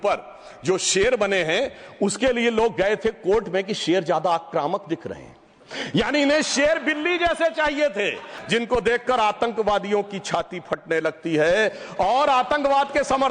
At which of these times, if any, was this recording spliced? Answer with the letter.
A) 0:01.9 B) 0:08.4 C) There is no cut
B